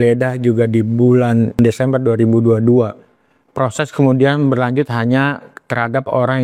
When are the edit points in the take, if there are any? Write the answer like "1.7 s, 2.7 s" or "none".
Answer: 1.6 s